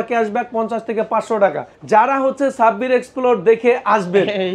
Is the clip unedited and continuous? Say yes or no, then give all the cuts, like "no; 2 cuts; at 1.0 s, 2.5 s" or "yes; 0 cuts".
no; 1 cut; at 1.7 s